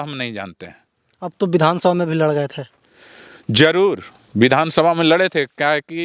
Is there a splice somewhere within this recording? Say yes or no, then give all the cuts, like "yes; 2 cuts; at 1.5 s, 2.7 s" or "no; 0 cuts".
no; 0 cuts